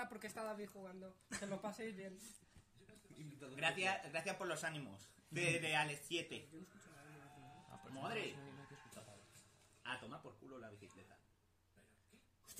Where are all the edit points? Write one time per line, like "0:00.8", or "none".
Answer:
none